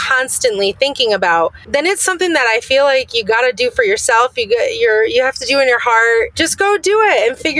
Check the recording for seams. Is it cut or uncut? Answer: cut